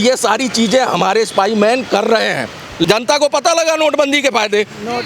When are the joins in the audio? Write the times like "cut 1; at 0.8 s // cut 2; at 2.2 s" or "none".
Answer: cut 1; at 2.9 s